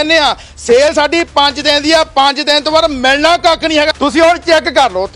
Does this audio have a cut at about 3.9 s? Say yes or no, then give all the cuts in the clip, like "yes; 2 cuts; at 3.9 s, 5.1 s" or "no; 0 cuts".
yes; 1 cut; at 3.9 s